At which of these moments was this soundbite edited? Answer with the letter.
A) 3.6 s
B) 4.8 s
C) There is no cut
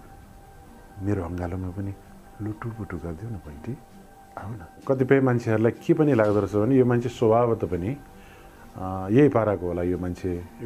B